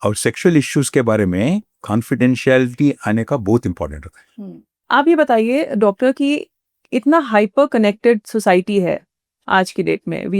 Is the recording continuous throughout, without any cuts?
no; 2 cuts; at 1.8 s, 4.8 s

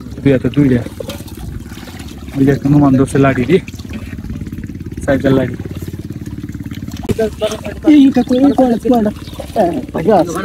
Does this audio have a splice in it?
yes; 1 cut; at 7.1 s

